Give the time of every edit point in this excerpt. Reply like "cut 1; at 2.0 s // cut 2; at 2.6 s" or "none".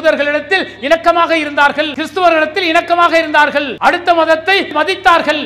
cut 1; at 2.0 s // cut 2; at 3.7 s // cut 3; at 4.7 s